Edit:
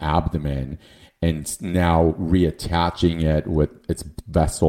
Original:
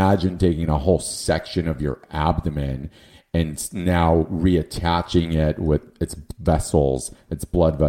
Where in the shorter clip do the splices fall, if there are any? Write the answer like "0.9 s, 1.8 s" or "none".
none